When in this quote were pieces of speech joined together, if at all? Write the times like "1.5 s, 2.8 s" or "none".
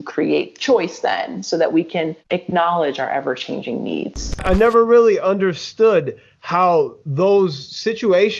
4.4 s